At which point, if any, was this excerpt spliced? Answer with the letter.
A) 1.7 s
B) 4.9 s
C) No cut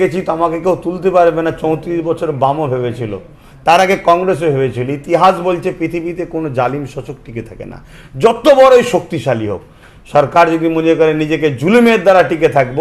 C